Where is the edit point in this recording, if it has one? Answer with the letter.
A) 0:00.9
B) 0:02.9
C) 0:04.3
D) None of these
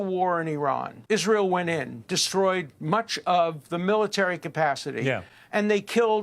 A